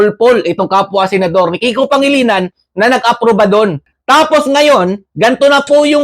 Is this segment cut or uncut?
cut